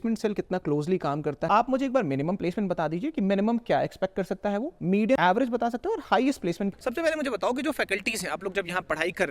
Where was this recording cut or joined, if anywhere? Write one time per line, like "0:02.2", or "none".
0:01.4
0:05.2
0:06.7